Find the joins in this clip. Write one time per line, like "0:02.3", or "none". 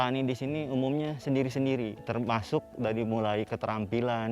0:02.0